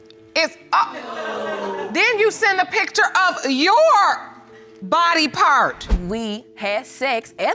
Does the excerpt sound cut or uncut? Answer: cut